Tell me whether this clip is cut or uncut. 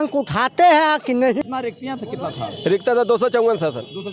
cut